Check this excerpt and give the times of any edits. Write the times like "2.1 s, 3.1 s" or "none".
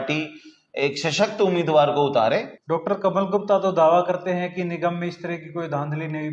2.5 s